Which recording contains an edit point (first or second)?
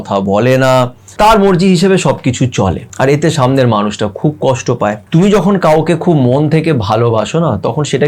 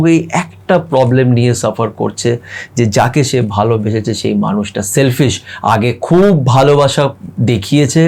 first